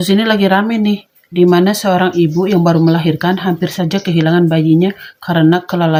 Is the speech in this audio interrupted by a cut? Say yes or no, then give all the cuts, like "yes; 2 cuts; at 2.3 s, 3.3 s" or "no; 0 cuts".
no; 0 cuts